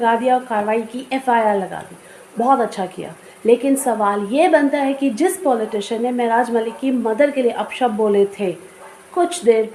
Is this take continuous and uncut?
yes; 0 cuts

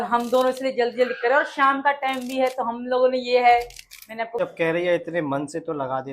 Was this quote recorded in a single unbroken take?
no; 1 cut; at 4.4 s

